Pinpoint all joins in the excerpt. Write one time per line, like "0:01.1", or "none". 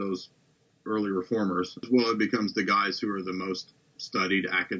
0:01.9